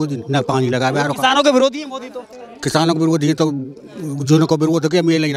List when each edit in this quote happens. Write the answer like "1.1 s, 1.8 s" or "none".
none